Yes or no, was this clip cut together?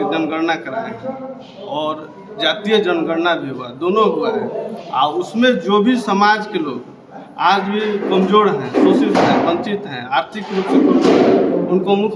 no